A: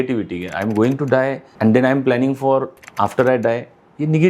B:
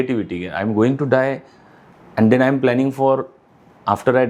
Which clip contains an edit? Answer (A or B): A